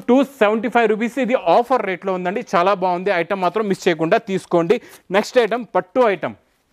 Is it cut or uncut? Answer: uncut